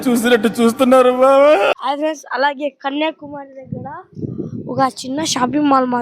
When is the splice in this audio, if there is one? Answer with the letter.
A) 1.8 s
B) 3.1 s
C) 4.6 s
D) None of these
A